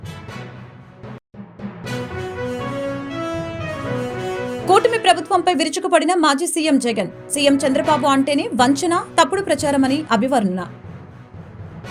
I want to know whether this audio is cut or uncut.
cut